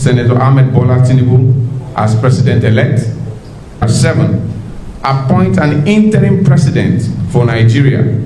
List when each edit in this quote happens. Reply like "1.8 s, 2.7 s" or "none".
3.8 s